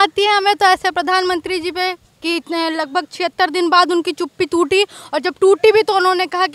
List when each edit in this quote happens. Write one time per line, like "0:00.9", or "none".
none